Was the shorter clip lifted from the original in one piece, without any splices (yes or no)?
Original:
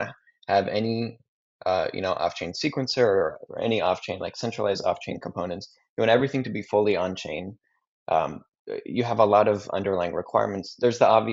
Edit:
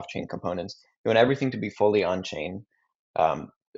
yes